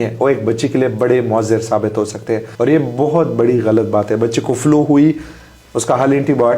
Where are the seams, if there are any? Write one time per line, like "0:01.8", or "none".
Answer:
0:02.5